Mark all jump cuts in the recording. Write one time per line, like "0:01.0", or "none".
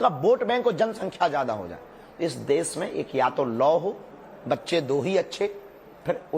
0:05.1